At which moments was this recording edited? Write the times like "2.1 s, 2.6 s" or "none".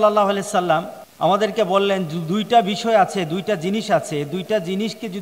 1.0 s